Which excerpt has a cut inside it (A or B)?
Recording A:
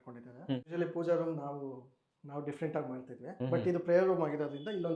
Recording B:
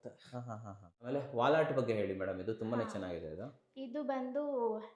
B